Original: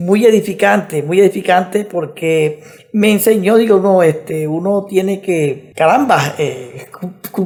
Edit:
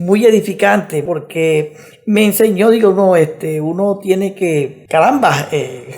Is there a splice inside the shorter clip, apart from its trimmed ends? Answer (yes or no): yes